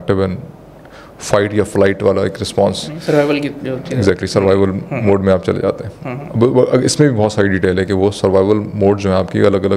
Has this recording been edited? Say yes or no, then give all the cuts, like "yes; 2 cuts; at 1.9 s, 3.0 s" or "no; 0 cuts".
no; 0 cuts